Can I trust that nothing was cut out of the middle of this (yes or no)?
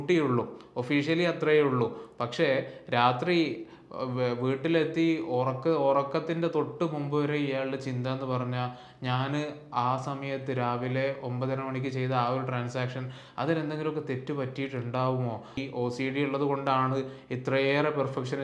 no